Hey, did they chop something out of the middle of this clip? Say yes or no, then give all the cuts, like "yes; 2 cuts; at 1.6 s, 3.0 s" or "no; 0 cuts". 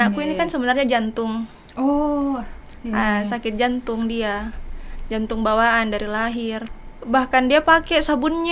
yes; 1 cut; at 6.6 s